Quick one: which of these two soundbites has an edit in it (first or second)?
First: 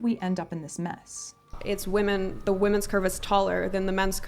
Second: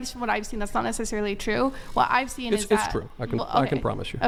first